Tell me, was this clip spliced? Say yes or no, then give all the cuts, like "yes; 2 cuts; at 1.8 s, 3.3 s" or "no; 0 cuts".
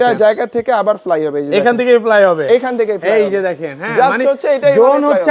no; 0 cuts